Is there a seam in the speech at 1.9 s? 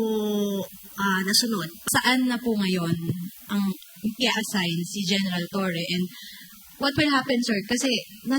yes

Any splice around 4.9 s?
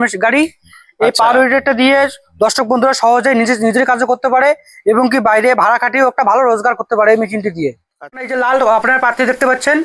no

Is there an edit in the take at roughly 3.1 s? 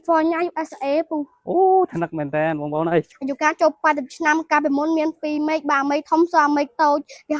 yes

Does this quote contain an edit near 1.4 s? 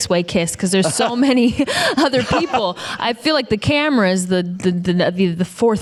no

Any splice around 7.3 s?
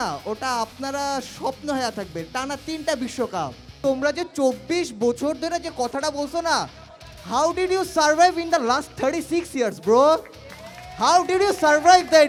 no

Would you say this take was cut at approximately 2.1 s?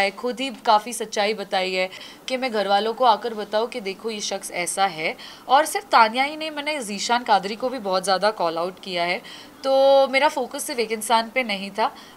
yes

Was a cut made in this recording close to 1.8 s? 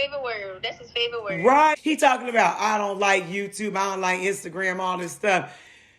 yes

